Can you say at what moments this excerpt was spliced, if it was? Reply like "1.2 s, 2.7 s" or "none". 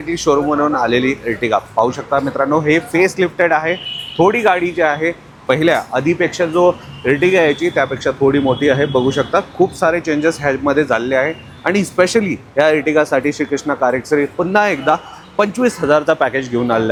none